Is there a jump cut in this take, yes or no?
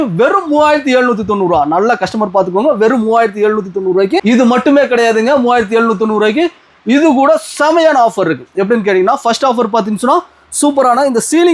yes